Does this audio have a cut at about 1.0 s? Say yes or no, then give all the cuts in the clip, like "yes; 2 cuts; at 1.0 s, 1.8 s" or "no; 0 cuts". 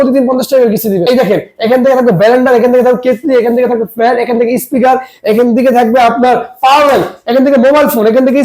yes; 1 cut; at 1.0 s